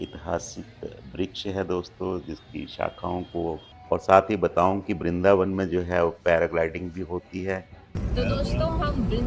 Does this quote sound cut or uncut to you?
cut